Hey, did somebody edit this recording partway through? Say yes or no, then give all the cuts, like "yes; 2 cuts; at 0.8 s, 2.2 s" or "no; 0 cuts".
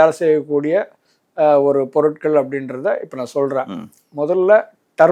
no; 0 cuts